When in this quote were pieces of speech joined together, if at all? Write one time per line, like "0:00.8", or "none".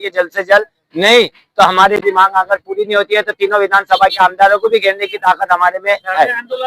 0:02.0